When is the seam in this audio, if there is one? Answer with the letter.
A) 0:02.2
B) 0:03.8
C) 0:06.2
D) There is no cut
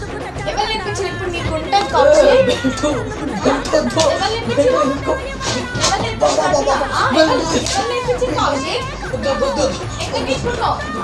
D